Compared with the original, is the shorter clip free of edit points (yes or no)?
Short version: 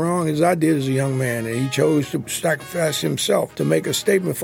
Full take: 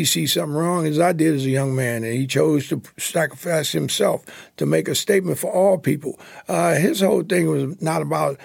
no